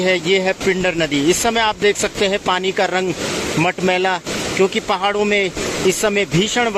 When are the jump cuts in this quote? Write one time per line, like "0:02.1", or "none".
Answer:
none